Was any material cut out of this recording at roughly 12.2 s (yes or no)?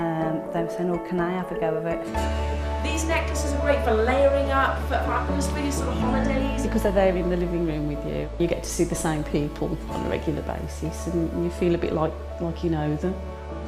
no